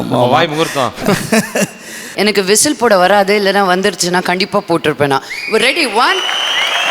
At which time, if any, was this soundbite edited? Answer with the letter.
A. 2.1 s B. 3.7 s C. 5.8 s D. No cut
A